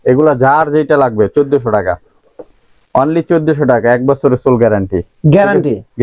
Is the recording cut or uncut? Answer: uncut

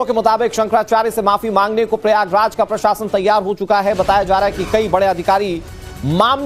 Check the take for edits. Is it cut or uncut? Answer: cut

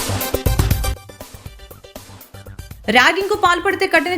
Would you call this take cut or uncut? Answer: cut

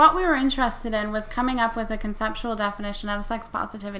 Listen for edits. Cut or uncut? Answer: uncut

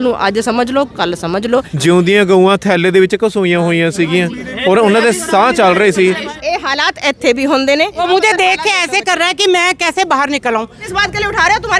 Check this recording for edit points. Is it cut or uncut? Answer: cut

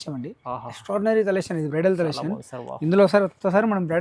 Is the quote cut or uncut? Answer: uncut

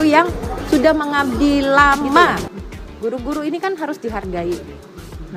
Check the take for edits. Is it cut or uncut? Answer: cut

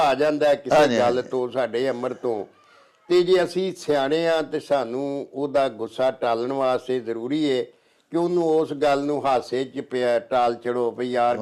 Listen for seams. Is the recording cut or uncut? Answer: uncut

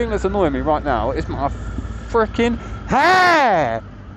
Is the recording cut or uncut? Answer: uncut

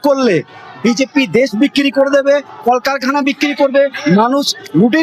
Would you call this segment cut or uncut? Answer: uncut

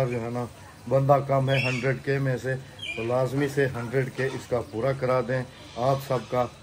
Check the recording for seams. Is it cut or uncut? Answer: uncut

